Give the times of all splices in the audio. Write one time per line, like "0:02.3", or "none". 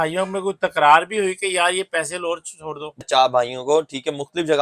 0:03.0